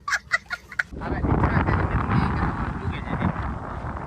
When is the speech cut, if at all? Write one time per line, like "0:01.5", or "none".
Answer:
0:00.9